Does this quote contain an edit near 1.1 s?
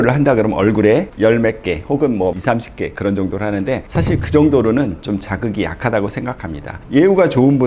no; 0 cuts

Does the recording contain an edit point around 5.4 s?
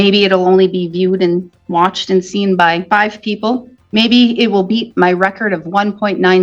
no; 2 cuts; at 2.8 s, 3.8 s

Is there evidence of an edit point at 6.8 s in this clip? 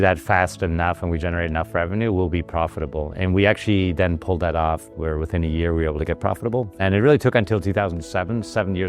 yes; 1 cut; at 6.8 s

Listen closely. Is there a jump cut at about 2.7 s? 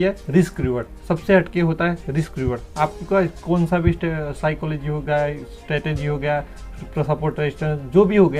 no; 0 cuts

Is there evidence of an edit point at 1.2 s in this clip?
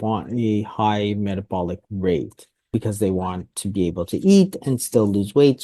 no; 1 cut; at 2.8 s

